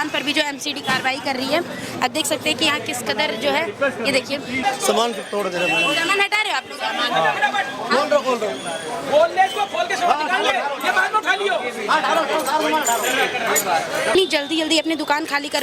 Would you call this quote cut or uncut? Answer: cut